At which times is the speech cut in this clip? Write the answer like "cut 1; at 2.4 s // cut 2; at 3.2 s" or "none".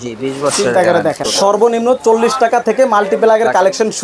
cut 1; at 1.2 s